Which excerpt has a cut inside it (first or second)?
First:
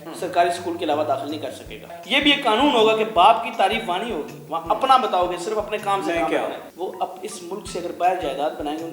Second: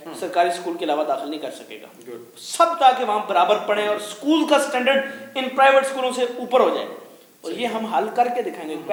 first